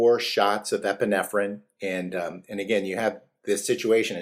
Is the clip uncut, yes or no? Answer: yes